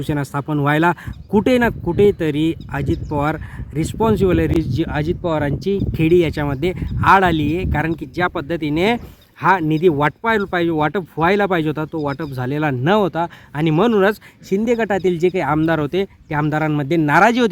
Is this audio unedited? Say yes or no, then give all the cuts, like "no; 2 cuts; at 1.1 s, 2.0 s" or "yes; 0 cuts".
yes; 0 cuts